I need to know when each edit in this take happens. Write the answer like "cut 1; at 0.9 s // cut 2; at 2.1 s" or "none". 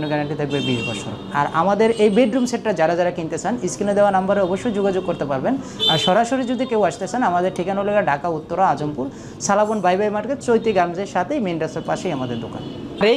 none